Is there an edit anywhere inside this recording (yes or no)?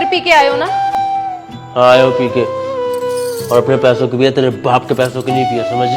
yes